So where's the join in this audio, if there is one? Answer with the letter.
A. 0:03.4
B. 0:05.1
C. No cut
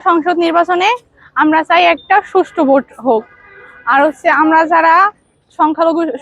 C